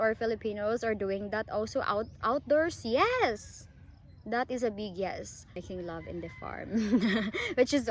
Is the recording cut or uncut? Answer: cut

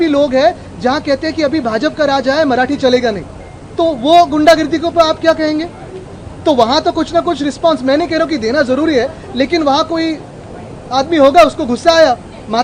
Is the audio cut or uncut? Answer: uncut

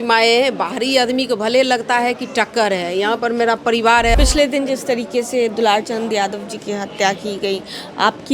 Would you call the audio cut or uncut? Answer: cut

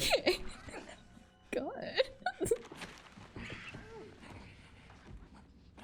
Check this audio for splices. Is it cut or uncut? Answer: uncut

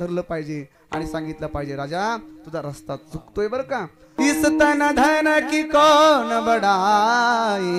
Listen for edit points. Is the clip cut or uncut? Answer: cut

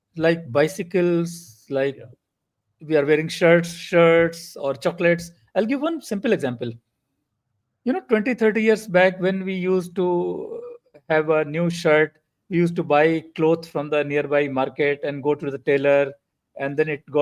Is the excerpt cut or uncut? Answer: uncut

